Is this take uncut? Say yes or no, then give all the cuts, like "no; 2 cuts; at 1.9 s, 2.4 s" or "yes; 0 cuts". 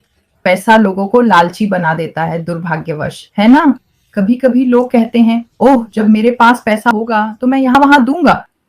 yes; 0 cuts